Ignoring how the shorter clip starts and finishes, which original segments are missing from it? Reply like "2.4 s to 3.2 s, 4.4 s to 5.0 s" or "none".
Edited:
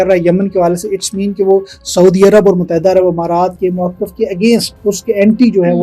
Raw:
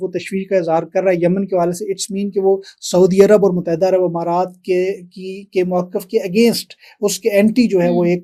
4.5 s to 5.5 s, 6.7 s to 6.9 s